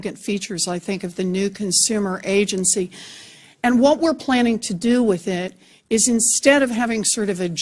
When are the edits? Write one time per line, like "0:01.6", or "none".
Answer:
0:01.2